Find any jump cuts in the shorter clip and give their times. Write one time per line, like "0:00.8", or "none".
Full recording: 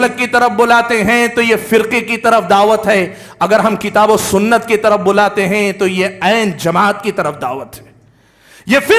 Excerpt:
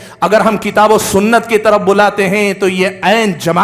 none